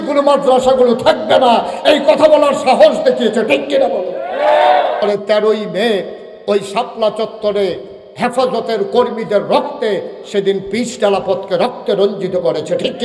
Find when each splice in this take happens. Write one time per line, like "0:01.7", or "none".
0:05.0